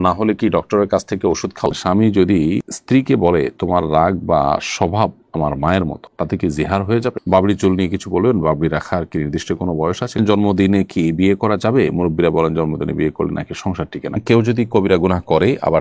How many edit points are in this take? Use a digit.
4